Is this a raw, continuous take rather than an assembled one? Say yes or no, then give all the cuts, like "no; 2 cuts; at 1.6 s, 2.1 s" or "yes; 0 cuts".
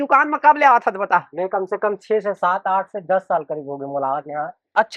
yes; 0 cuts